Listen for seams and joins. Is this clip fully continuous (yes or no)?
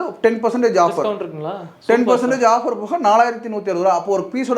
yes